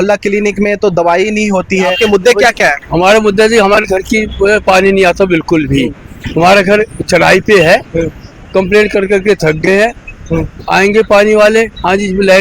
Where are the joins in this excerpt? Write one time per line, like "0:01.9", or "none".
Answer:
0:02.0